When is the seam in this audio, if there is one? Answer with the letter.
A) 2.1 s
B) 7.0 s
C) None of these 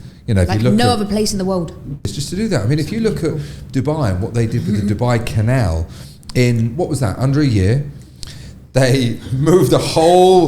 A